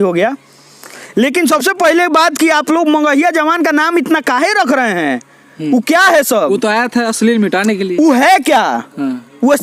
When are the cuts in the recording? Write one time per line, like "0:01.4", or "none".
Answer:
none